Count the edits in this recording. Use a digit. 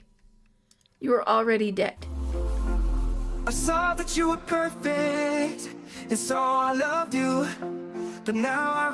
1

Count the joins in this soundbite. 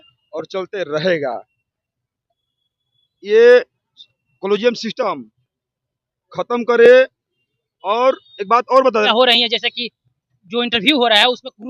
1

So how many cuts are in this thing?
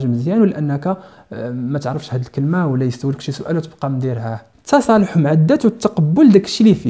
1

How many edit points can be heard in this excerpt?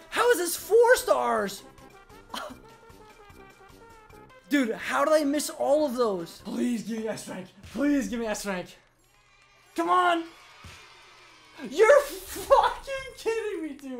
3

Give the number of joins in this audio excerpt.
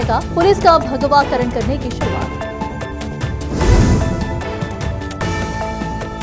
0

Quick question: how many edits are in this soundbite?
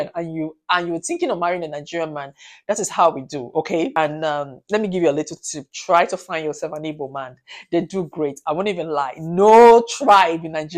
1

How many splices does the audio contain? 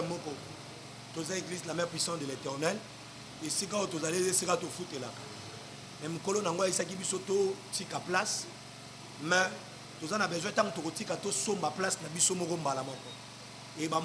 0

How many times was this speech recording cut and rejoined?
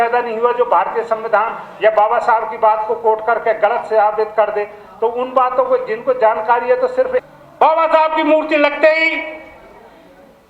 1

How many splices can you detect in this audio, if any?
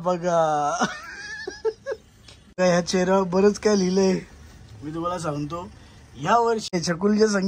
2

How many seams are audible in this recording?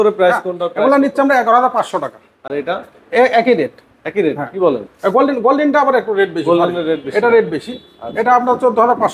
0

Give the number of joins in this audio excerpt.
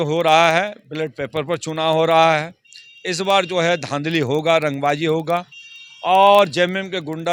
0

